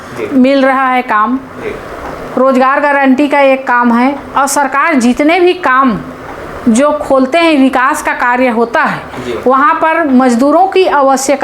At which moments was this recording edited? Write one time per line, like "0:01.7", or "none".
none